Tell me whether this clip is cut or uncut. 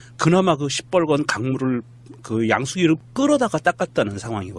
cut